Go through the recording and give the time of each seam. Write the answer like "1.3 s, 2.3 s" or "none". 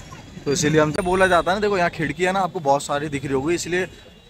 1.0 s